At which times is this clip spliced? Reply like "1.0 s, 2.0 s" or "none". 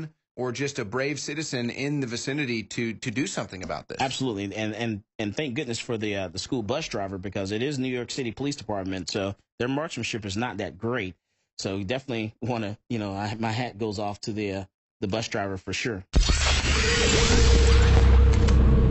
16.0 s